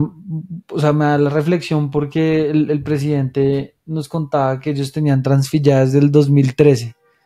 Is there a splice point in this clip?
no; 0 cuts

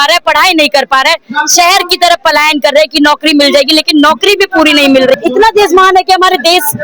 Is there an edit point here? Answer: yes; 1 cut; at 5.1 s

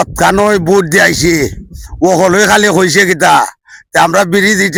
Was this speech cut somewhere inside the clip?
no; 0 cuts

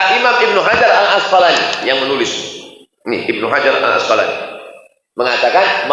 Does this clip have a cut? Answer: no; 0 cuts

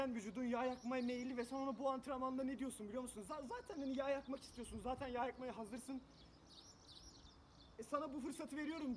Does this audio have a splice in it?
no; 0 cuts

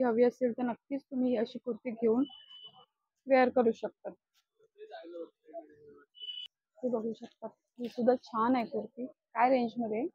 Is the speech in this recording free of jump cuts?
yes; 0 cuts

